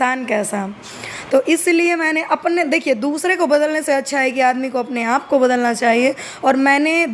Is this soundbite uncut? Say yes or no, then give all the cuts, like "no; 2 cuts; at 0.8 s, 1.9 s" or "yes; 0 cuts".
yes; 0 cuts